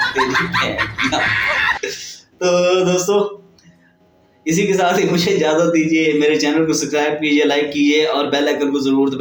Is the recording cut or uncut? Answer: uncut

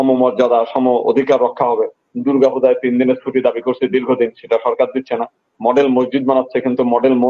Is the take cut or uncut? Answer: uncut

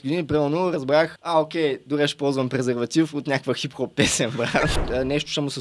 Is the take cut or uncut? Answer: cut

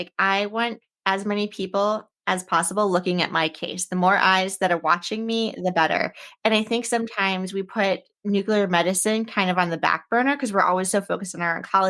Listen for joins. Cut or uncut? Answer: uncut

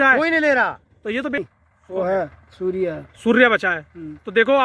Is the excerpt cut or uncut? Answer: cut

